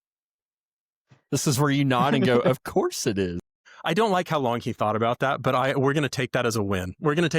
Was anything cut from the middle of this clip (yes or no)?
no